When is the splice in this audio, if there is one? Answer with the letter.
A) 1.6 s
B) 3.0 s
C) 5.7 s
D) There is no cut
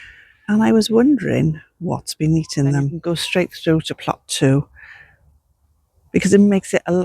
B